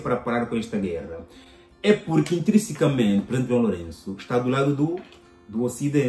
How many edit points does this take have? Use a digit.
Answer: 0